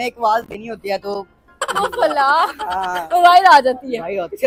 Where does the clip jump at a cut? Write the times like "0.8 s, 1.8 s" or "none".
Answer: none